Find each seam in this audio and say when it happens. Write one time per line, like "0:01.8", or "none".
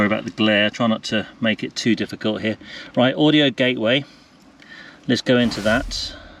none